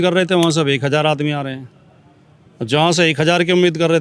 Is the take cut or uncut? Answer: uncut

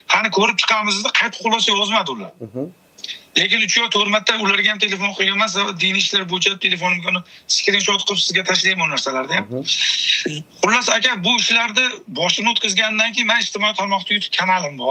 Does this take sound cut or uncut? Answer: uncut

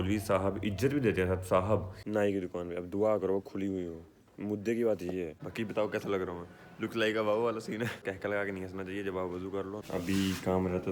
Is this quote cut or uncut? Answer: cut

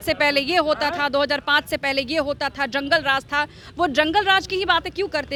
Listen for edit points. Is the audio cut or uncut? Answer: uncut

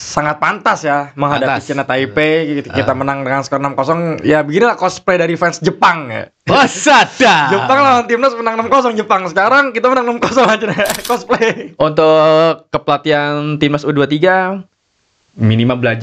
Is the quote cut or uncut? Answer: cut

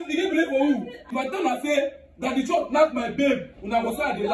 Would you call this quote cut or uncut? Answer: cut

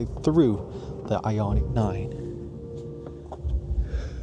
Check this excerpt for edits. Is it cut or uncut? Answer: uncut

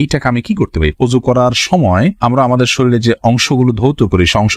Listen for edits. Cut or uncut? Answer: cut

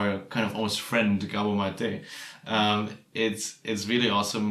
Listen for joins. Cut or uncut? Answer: uncut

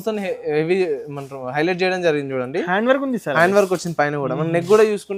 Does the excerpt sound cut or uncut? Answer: uncut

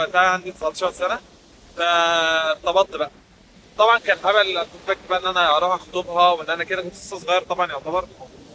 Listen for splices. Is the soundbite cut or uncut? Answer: uncut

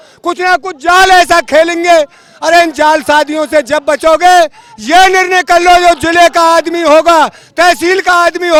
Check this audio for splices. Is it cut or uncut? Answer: uncut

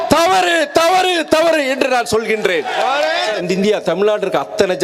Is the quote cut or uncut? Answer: cut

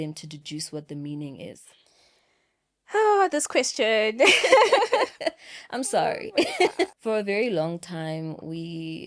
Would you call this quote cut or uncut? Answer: cut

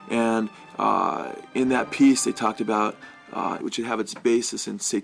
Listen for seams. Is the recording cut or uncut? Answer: uncut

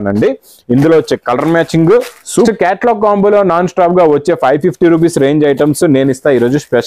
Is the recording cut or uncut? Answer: cut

